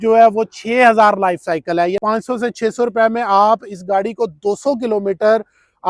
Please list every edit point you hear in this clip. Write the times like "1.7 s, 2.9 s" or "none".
2.0 s